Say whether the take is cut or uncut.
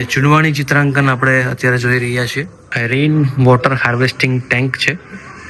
cut